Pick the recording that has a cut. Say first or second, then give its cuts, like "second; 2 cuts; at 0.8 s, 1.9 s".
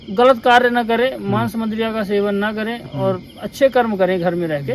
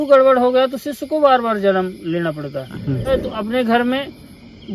second; 1 cut; at 3.1 s